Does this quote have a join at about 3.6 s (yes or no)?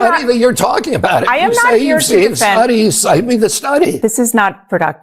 yes